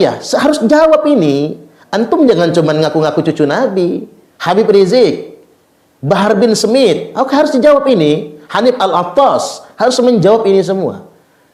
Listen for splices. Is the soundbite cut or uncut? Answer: uncut